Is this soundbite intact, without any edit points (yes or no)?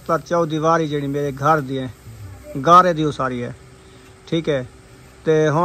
yes